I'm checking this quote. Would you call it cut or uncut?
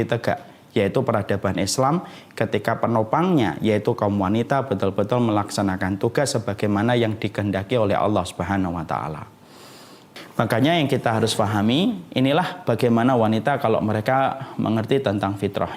cut